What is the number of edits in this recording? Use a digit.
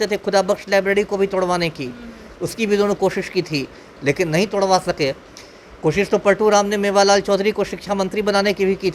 0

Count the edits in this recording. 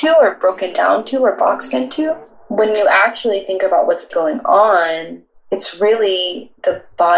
2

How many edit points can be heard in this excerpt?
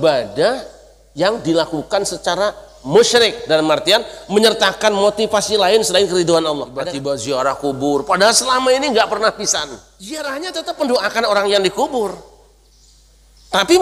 2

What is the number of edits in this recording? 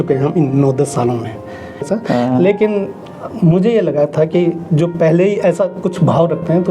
1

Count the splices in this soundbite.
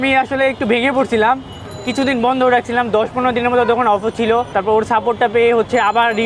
1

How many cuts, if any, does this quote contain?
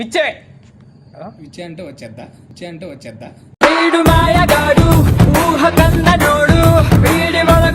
0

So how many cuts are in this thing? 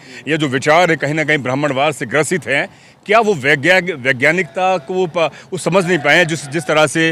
0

